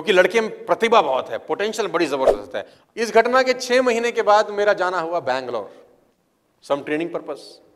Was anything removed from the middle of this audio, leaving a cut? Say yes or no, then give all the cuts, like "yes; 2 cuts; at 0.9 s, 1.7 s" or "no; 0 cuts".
yes; 1 cut; at 2.7 s